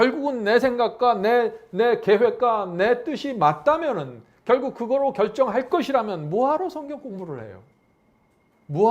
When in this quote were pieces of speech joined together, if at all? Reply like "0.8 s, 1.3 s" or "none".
none